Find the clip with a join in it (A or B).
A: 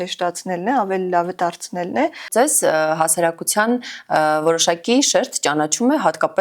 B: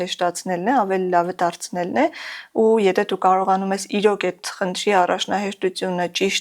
A